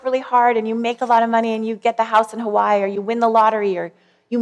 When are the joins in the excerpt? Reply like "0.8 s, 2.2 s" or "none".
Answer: none